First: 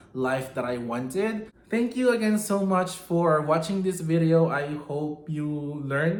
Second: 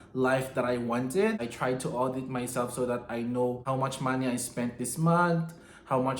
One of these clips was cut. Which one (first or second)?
second